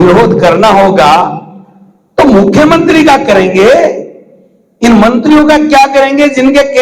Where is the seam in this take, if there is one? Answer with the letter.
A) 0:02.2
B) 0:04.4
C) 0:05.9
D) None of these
D